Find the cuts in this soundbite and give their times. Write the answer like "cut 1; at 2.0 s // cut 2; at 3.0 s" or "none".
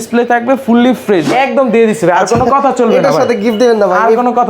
cut 1; at 1.2 s